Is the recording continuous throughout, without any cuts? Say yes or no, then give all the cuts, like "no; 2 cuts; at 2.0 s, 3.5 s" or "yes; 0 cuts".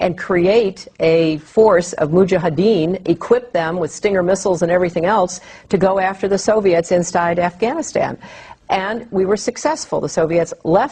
yes; 0 cuts